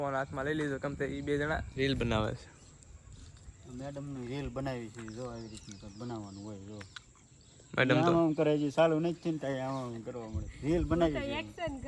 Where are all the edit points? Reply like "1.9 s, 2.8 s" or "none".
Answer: none